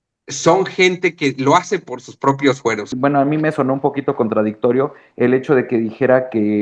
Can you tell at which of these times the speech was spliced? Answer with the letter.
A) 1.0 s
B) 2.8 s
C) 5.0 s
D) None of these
B